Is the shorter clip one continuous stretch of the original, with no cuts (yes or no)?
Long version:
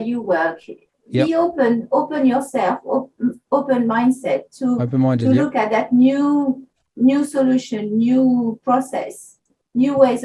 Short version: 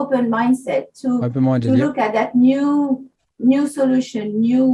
yes